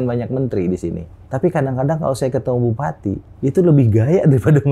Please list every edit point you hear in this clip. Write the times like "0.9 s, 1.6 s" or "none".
1.1 s, 3.3 s